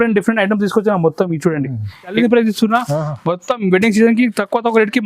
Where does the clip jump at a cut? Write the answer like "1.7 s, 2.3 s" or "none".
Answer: 2.1 s